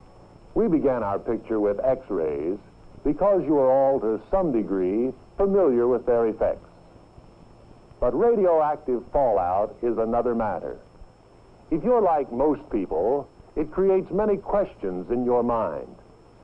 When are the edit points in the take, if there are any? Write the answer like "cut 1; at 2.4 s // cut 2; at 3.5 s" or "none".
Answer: none